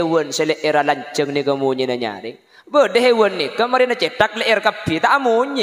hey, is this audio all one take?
yes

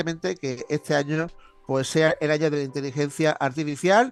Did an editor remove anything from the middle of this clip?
no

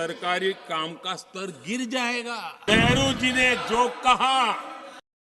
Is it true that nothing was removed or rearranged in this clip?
no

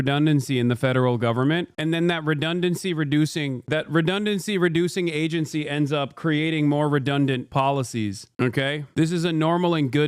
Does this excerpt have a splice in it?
yes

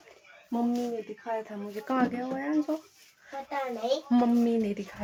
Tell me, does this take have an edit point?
no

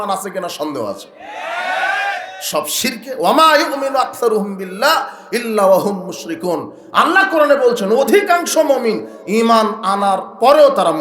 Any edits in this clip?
no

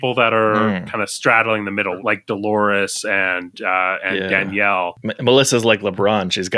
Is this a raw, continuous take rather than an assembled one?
no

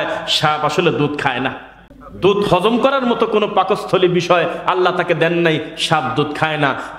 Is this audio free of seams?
no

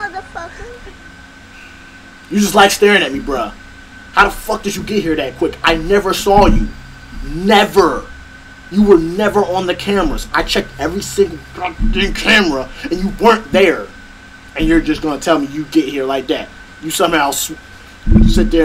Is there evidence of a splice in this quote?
yes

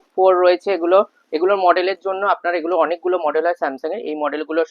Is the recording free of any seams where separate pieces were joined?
yes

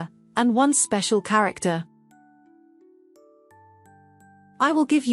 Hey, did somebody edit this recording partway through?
yes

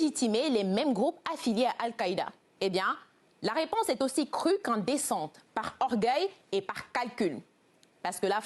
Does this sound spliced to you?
yes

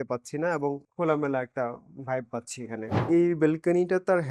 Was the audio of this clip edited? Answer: yes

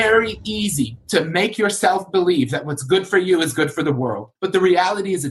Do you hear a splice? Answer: yes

